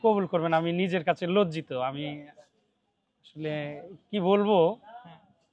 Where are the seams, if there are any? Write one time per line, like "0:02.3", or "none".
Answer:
none